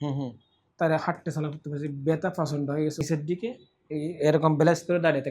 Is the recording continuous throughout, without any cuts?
no; 1 cut; at 3.0 s

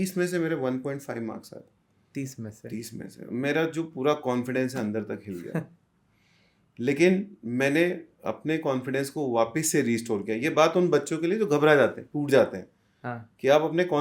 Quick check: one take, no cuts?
yes; 0 cuts

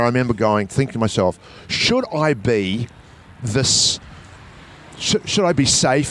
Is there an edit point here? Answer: no; 0 cuts

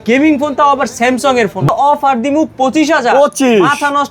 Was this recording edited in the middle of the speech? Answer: yes; 1 cut; at 1.7 s

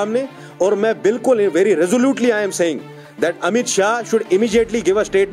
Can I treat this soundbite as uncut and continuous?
yes; 0 cuts

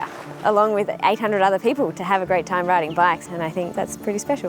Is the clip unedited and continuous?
no; 2 cuts; at 1.9 s, 3.4 s

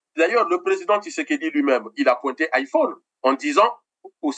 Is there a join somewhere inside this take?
no; 0 cuts

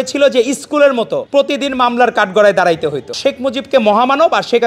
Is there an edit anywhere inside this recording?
yes; 2 cuts; at 1.2 s, 3.1 s

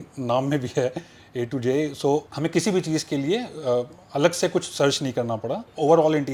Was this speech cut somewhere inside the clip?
no; 0 cuts

